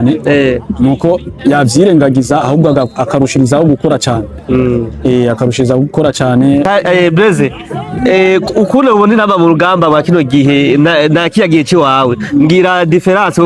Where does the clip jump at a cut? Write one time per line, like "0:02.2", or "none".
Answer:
0:06.7